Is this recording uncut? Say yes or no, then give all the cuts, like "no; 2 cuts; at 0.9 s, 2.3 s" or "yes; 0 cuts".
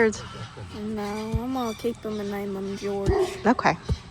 yes; 0 cuts